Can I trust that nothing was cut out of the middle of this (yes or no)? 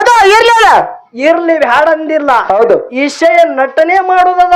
yes